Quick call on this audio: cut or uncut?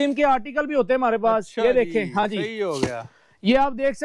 uncut